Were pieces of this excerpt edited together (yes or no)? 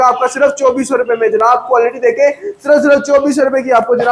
no